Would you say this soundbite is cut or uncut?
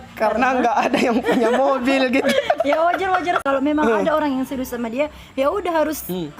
cut